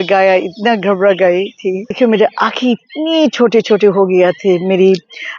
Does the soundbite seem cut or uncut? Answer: cut